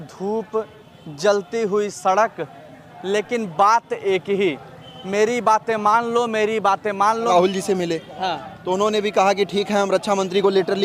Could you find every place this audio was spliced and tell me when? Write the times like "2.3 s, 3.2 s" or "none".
7.3 s